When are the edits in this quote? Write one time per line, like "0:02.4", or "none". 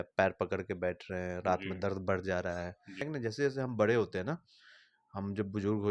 0:03.0